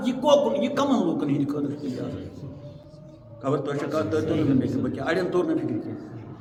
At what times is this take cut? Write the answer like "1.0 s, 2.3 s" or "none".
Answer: none